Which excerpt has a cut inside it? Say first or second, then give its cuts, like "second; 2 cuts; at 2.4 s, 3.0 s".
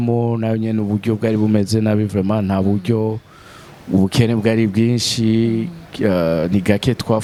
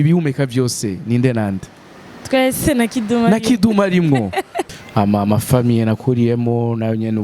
second; 1 cut; at 4.6 s